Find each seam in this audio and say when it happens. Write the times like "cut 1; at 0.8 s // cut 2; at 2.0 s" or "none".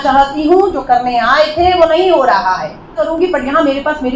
cut 1; at 3.0 s